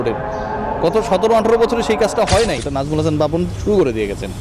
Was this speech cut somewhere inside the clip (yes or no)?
yes